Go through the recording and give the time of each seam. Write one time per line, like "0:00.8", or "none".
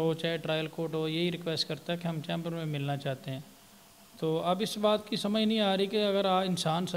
none